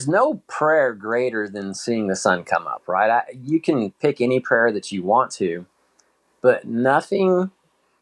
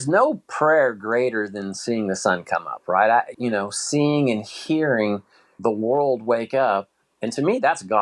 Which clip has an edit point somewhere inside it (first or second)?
second